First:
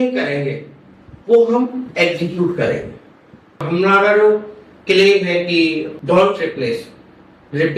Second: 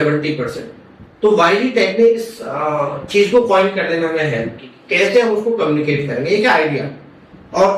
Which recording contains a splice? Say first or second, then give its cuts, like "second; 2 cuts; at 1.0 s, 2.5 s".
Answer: first; 2 cuts; at 3.6 s, 5.9 s